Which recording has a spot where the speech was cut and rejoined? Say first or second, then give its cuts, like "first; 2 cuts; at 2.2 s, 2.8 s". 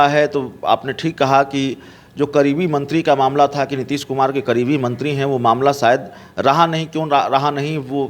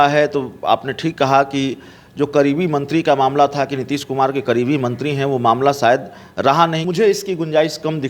second; 1 cut; at 6.9 s